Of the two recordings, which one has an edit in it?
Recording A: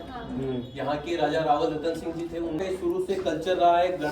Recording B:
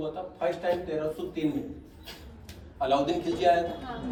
A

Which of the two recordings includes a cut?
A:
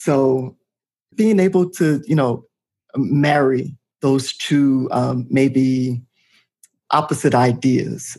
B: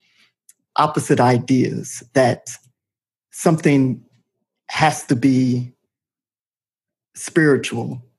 A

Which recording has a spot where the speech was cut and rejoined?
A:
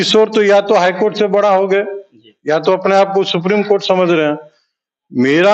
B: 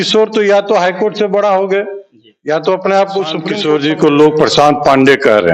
B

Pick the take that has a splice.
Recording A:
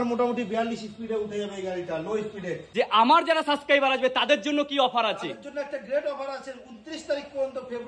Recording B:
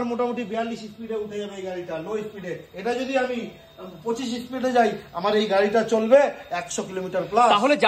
A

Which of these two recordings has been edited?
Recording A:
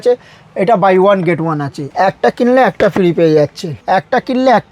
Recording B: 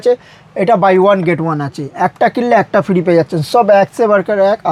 A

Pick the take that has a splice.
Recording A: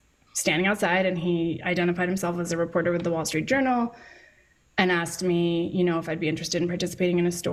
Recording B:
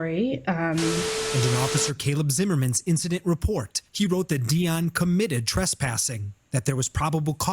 B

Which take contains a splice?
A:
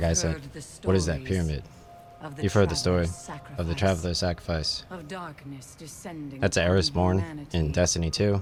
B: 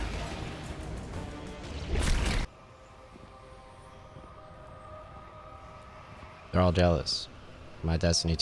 B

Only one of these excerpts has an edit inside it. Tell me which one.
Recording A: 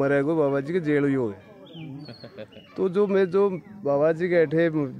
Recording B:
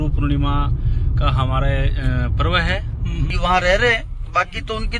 B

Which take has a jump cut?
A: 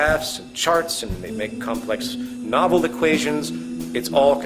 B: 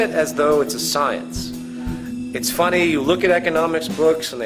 A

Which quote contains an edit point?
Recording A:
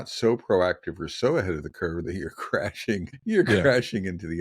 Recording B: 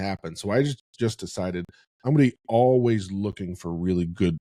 A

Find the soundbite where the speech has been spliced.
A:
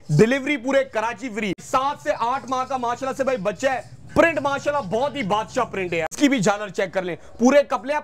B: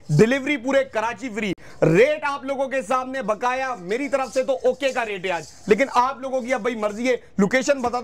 A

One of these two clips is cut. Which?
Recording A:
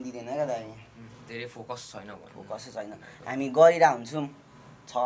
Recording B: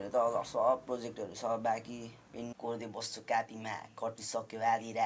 B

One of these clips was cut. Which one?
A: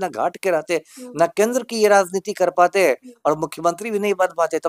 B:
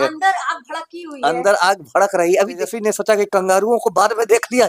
B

